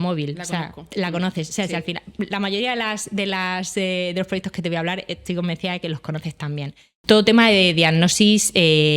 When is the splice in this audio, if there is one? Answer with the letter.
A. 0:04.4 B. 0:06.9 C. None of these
B